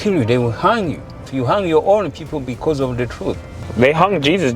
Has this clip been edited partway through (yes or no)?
yes